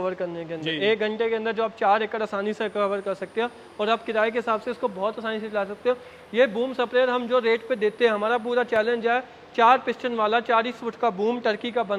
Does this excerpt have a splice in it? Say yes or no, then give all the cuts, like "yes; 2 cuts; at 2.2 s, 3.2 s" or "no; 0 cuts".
no; 0 cuts